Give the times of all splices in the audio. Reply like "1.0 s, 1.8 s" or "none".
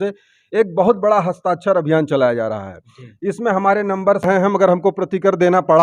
4.2 s